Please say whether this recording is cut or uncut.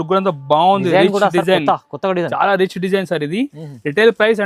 uncut